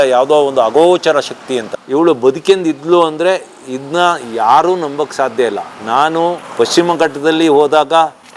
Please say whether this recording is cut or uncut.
cut